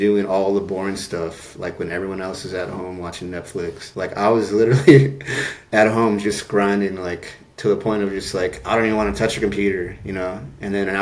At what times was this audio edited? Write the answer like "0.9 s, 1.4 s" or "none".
none